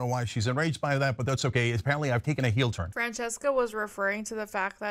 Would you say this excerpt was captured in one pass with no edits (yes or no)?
yes